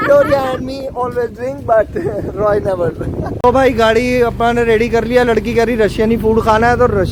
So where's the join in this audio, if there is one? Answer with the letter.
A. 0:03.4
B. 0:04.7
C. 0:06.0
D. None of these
D